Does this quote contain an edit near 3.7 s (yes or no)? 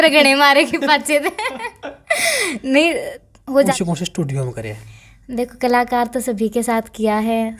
yes